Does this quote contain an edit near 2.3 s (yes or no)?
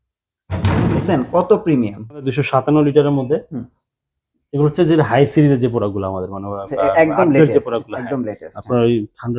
yes